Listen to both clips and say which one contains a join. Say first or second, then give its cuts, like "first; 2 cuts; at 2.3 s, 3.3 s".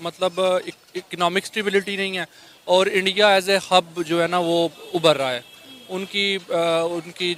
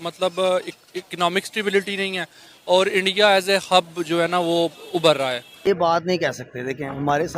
second; 1 cut; at 5.7 s